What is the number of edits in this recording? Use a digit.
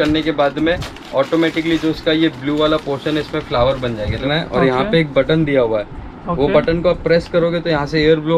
1